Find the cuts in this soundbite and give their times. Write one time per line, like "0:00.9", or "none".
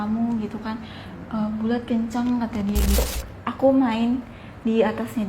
0:03.0